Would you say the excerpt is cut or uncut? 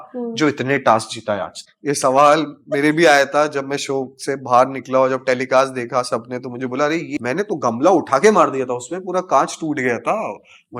cut